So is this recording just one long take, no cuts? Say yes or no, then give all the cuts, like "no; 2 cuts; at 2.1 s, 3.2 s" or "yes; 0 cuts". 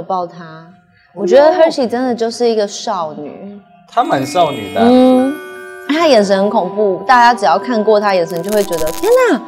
yes; 0 cuts